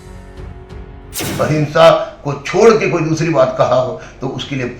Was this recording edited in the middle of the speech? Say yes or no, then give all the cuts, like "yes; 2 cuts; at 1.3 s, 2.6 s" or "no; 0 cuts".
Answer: yes; 1 cut; at 1.2 s